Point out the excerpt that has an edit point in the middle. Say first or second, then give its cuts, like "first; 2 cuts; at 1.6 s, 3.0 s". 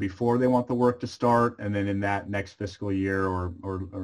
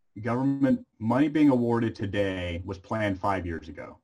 second; 1 cut; at 0.9 s